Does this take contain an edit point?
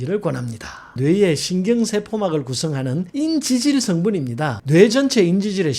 yes; 1 cut; at 1.0 s

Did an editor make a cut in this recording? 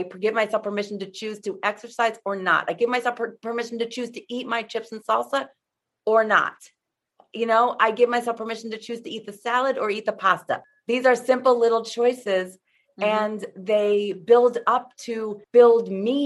yes; 2 cuts; at 10.6 s, 15.3 s

